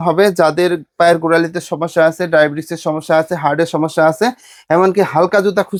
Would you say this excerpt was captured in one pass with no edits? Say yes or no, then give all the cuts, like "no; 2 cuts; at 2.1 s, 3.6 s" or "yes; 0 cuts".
yes; 0 cuts